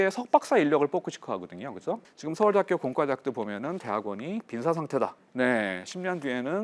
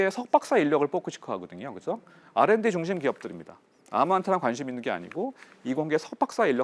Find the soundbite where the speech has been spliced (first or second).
first